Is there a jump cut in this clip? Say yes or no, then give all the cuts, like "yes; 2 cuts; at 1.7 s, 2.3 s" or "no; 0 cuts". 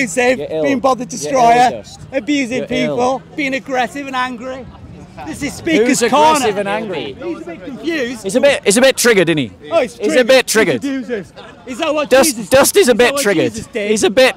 no; 0 cuts